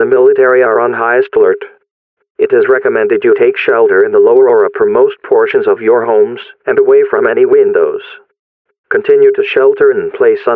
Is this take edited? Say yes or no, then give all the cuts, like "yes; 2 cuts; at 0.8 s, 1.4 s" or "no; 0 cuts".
no; 0 cuts